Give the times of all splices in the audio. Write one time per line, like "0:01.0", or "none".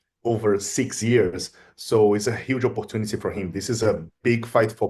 none